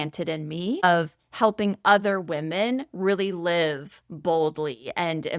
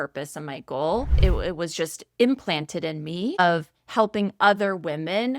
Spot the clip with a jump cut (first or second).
second